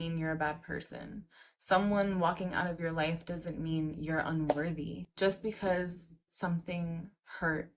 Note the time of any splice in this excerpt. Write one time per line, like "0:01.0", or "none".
none